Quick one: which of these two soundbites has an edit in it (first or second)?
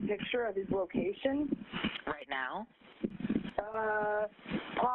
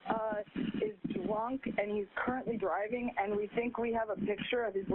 first